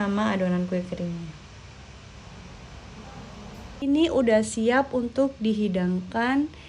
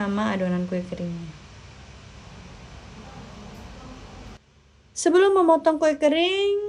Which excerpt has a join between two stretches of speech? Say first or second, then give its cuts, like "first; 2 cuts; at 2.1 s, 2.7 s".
first; 1 cut; at 3.8 s